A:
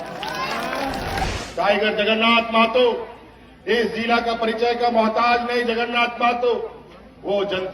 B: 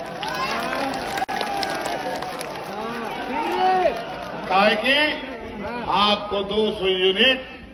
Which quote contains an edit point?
A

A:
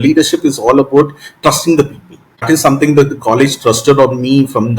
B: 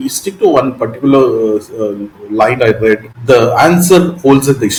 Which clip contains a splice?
A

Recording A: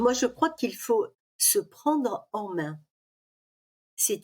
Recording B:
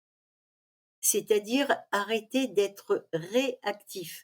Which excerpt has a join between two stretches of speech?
A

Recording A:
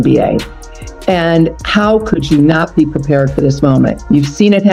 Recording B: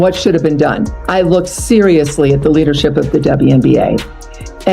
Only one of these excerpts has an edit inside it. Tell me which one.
B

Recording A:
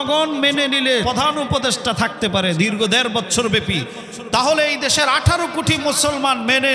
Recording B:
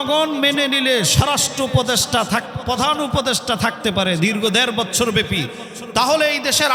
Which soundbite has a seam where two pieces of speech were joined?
A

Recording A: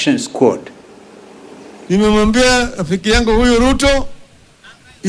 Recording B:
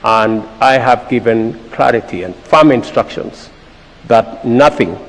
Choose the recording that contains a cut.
A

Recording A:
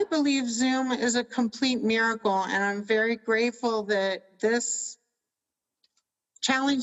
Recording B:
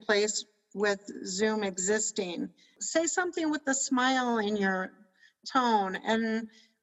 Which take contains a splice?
B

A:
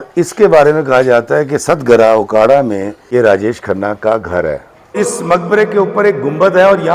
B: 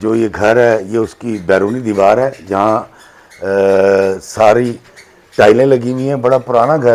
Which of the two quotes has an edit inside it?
A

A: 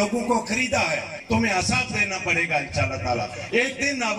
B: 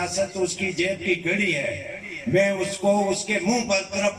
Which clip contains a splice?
A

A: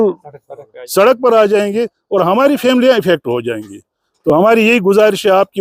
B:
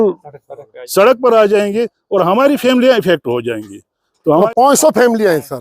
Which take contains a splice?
B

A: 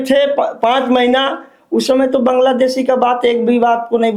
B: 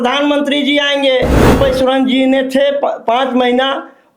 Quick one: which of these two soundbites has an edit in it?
B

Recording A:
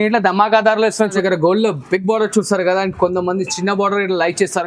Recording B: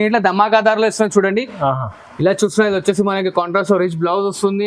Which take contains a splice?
A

